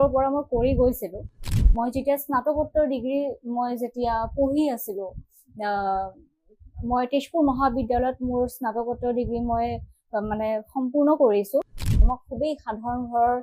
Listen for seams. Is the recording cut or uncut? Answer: cut